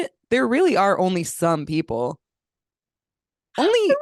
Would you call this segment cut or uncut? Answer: uncut